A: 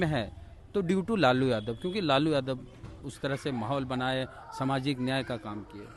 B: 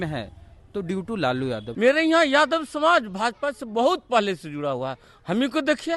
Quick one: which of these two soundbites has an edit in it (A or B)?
B